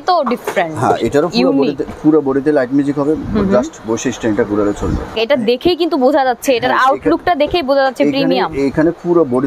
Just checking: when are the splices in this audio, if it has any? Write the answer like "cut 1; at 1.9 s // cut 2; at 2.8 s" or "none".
cut 1; at 5.2 s